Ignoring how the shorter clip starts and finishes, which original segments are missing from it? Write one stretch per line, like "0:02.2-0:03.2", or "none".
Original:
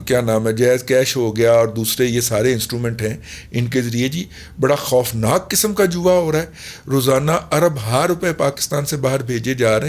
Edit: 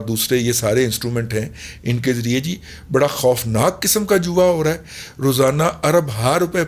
none